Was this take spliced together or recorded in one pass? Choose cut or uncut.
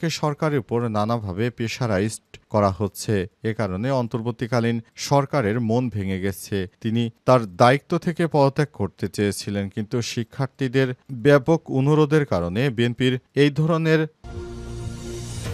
cut